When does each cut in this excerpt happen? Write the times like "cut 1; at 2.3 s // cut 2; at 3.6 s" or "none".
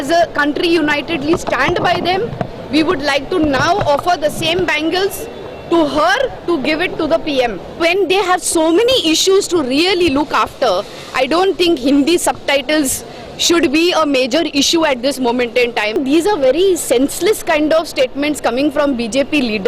cut 1; at 7.8 s // cut 2; at 16.0 s